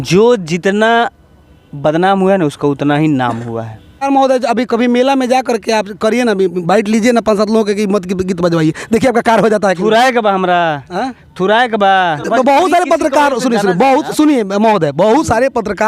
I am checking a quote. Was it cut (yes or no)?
yes